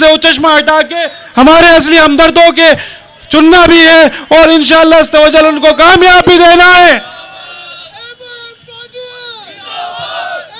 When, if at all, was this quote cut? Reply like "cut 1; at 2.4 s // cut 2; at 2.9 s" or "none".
none

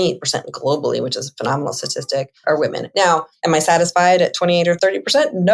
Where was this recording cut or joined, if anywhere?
cut 1; at 2.3 s // cut 2; at 3.3 s // cut 3; at 4.8 s

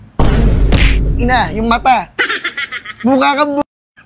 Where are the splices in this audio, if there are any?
none

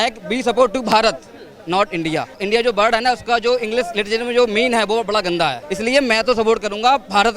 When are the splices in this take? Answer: cut 1; at 2.3 s // cut 2; at 5.6 s

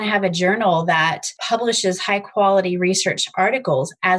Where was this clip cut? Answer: cut 1; at 1.3 s

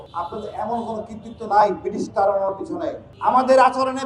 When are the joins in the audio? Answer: cut 1; at 3.1 s

